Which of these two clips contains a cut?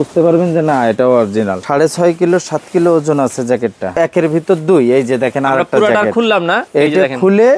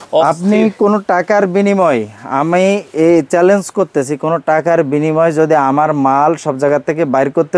first; 2 cuts; at 1.6 s, 4.0 s

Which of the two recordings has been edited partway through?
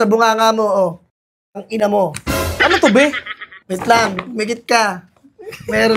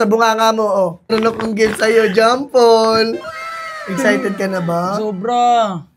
second; 1 cut; at 1.1 s

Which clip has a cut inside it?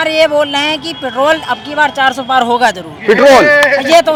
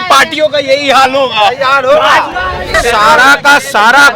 second; 1 cut; at 2.7 s

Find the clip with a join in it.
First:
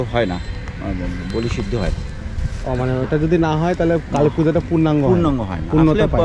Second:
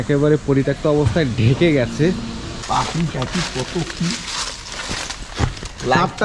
second; 1 cut; at 2.6 s

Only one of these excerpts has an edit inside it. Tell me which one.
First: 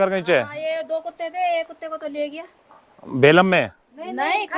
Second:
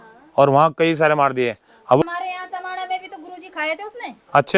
second; 1 cut; at 2.0 s

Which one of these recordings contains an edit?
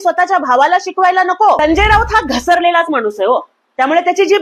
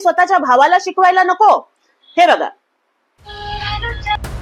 first; 1 cut; at 1.6 s

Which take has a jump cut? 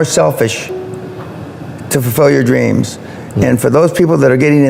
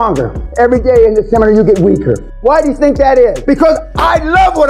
second; 2 cuts; at 2.3 s, 3.4 s

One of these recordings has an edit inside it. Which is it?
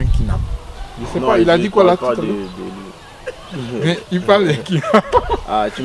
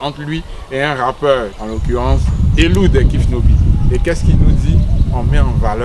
second; 1 cut; at 1.6 s

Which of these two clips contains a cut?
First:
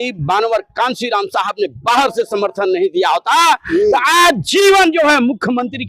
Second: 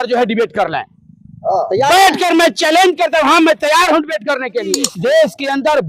second; 1 cut; at 4.9 s

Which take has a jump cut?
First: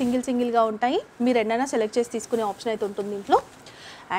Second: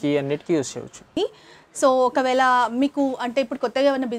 second; 1 cut; at 1.1 s

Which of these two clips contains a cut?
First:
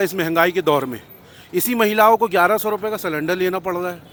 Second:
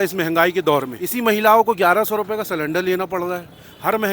second; 1 cut; at 1.0 s

